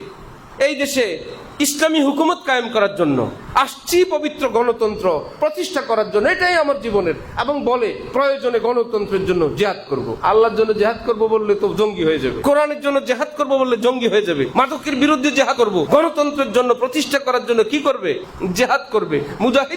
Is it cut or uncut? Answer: cut